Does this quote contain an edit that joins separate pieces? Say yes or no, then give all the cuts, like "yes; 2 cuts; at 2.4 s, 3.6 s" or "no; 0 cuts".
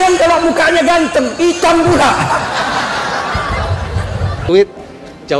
yes; 1 cut; at 4.3 s